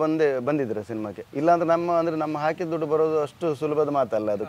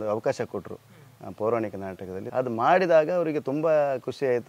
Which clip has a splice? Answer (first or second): second